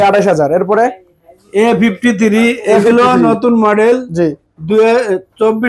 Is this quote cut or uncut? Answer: uncut